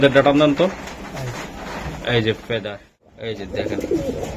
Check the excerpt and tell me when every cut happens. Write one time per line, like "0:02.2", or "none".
0:03.1

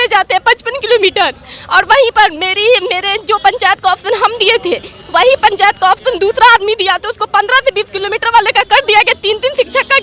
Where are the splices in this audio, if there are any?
none

